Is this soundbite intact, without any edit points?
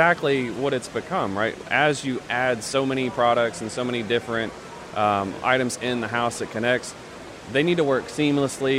yes; 0 cuts

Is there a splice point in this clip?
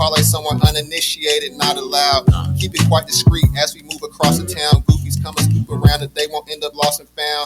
no; 0 cuts

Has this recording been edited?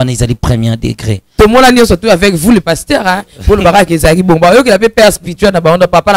yes; 1 cut; at 1.2 s

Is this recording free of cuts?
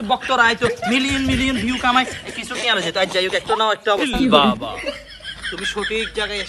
no; 1 cut; at 4.1 s

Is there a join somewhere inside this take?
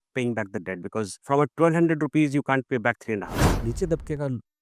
yes; 2 cuts; at 1.2 s, 3.5 s

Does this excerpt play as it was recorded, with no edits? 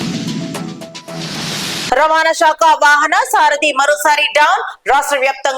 no; 1 cut; at 1.9 s

